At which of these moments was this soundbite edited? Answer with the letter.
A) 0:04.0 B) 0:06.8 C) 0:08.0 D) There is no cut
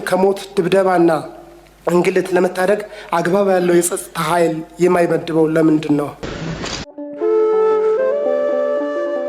B